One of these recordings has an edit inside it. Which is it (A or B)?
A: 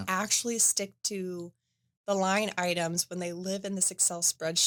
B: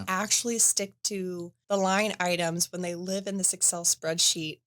B